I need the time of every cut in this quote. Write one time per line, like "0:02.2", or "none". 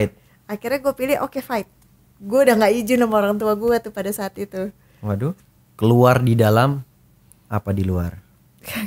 0:05.4